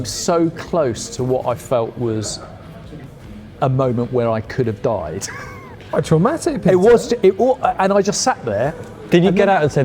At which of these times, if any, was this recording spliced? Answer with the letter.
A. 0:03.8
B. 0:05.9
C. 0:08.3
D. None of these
B